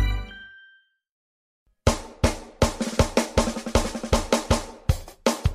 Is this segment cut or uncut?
cut